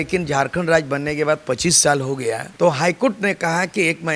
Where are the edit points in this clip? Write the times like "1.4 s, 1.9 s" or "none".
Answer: 2.5 s